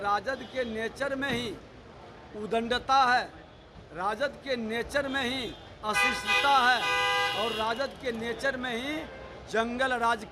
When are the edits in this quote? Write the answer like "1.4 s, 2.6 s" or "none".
none